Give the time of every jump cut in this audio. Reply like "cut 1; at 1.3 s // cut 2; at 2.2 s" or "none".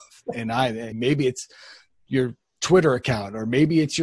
cut 1; at 0.9 s